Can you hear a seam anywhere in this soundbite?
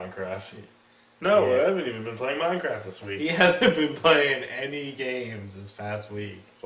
yes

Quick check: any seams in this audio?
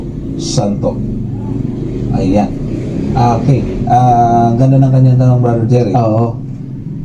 yes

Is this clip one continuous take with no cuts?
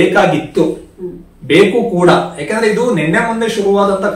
yes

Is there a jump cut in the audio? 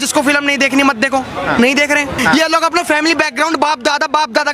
yes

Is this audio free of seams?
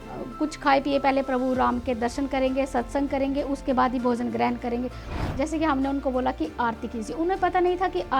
no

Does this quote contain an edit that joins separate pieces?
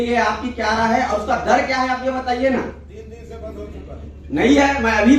no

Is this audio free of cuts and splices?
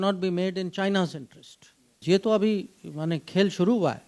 no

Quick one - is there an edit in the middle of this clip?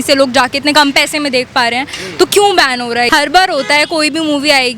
yes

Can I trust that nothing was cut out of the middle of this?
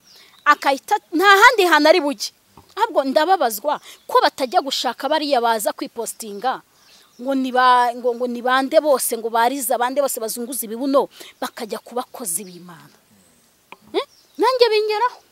no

